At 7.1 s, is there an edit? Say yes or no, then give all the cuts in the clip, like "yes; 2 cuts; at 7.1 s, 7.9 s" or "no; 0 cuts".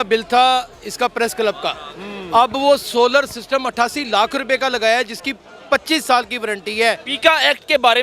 yes; 1 cut; at 7.1 s